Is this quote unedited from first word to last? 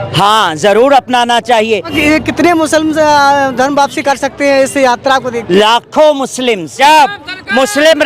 no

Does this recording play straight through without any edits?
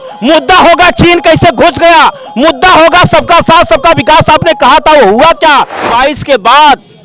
no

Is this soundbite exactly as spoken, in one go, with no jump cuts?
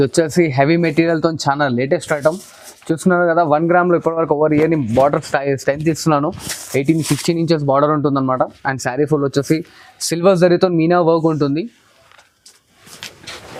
yes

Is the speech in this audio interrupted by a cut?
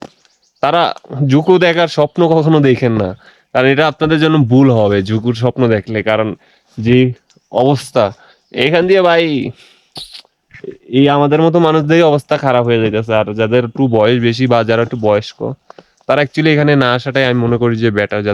no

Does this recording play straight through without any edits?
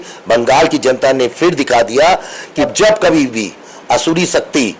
no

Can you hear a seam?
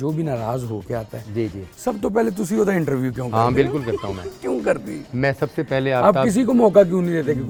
no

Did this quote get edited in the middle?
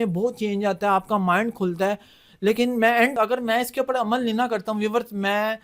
yes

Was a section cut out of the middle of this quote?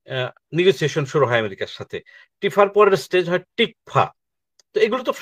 no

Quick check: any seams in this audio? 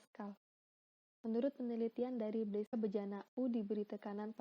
yes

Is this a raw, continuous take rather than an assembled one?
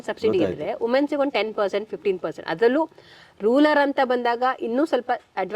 yes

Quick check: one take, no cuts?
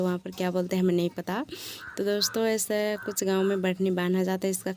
yes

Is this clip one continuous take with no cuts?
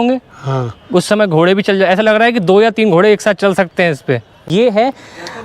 no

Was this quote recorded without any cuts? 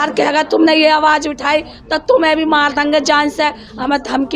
yes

